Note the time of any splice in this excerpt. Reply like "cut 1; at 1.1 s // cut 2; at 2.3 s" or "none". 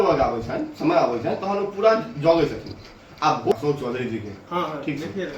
cut 1; at 3.5 s